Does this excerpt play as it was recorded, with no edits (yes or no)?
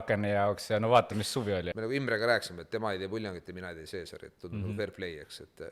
no